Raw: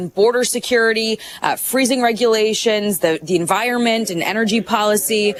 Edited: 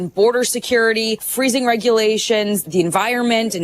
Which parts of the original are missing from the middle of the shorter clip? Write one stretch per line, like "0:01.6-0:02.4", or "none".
0:01.3-0:01.6
0:03.0-0:03.2